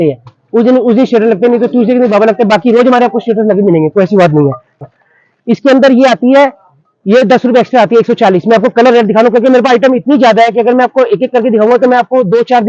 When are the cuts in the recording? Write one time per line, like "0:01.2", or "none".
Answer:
0:04.8